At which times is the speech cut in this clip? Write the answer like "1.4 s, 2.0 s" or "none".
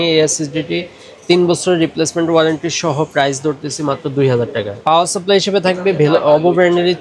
4.8 s